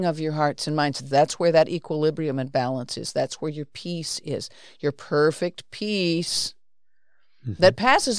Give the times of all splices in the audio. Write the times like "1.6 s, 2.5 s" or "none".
1.0 s